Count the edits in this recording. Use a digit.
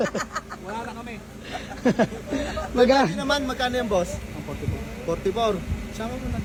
0